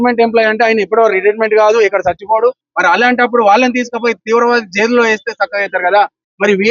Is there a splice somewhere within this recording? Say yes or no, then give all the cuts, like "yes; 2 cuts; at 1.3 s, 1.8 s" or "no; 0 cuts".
yes; 1 cut; at 2.7 s